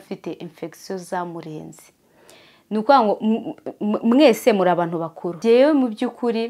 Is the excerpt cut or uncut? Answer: cut